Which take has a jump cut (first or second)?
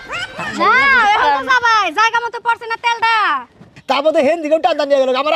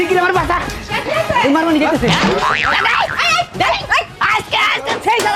first